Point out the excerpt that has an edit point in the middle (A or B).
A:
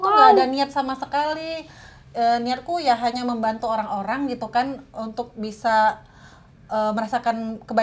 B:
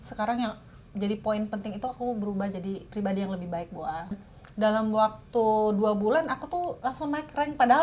B